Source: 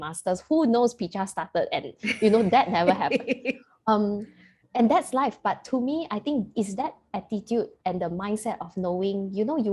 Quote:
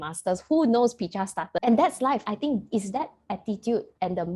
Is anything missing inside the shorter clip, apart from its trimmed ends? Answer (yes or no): yes